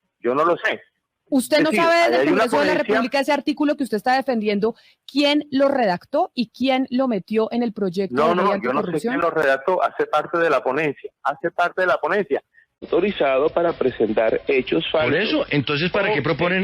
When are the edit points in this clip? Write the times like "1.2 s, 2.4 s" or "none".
12.9 s